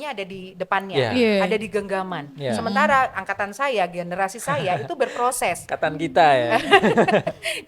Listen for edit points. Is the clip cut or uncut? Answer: uncut